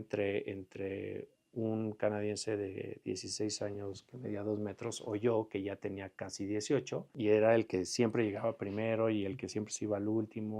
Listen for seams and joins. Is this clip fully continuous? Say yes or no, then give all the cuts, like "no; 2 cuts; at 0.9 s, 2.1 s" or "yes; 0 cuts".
no; 1 cut; at 7.1 s